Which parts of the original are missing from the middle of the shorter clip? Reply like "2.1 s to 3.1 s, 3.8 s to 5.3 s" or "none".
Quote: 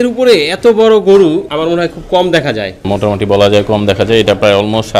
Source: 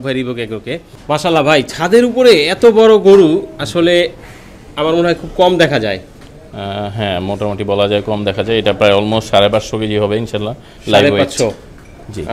3.5 s to 4.7 s, 6.1 s to 7.2 s